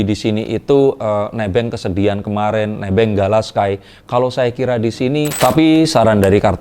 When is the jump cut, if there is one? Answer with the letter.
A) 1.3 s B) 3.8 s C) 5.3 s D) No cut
C